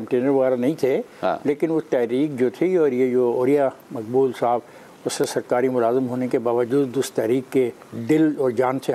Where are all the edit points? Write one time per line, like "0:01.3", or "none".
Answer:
none